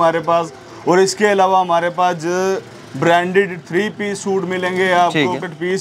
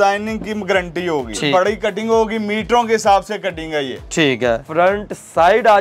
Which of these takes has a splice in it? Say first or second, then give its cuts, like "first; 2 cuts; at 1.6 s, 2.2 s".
second; 2 cuts; at 1.5 s, 4.6 s